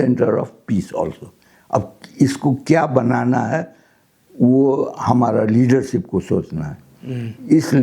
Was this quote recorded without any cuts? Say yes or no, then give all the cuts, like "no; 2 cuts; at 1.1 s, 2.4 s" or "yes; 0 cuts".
yes; 0 cuts